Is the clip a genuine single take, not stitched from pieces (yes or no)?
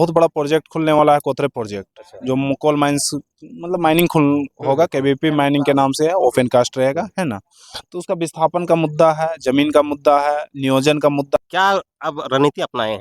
no